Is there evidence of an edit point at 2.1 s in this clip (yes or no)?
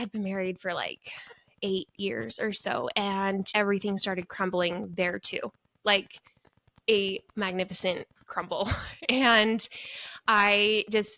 no